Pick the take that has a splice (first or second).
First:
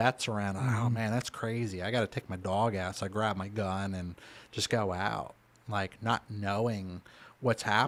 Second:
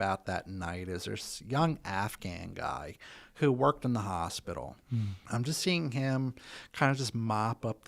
second